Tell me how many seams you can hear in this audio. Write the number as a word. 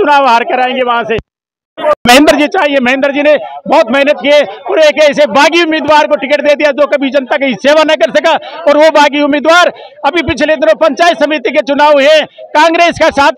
zero